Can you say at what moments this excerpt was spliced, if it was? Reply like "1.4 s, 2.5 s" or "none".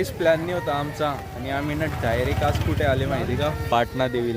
none